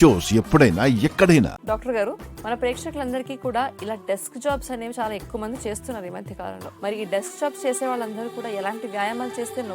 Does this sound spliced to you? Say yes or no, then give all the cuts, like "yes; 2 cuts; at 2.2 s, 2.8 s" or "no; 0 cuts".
yes; 1 cut; at 1.6 s